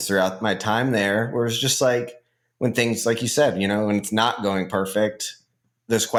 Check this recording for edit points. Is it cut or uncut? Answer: uncut